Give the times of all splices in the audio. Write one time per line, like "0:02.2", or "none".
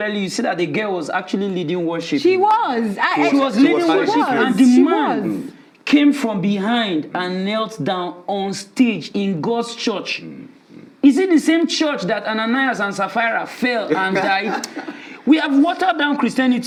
none